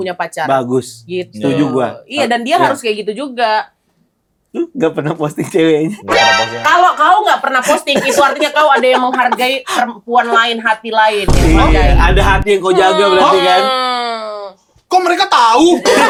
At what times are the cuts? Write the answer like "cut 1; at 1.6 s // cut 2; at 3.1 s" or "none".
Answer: none

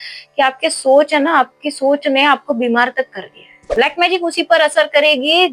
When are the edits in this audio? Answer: cut 1; at 3.8 s

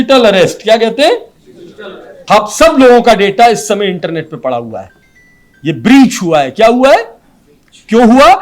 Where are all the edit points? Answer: cut 1; at 2.2 s

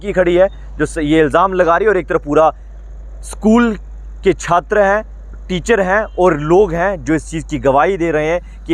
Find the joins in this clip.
none

